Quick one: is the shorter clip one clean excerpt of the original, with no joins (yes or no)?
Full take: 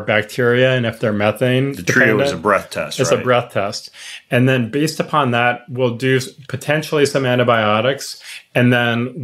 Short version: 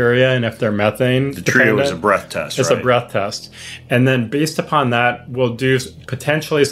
yes